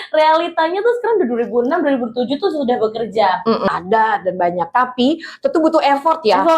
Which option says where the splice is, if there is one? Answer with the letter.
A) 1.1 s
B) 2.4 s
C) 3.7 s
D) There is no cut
C